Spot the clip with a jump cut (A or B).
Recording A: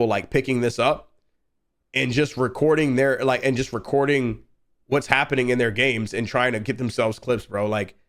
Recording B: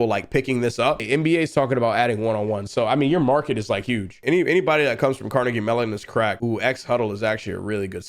B